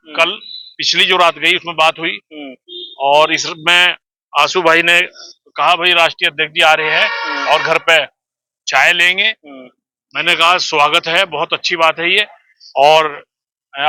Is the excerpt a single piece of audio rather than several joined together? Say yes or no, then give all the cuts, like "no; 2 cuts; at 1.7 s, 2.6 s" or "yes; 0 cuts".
yes; 0 cuts